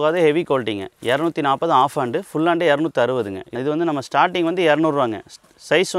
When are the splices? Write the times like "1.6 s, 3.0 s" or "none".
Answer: 3.5 s